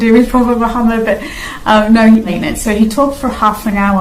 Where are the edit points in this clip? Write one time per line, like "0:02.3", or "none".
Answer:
0:02.3